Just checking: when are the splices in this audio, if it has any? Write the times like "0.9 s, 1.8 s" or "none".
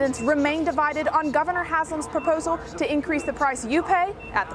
none